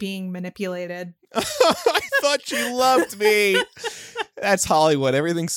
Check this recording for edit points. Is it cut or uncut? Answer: uncut